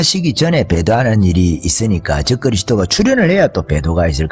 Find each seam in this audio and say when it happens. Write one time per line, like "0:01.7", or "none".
none